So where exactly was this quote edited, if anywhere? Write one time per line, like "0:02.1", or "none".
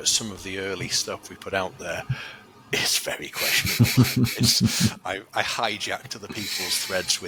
none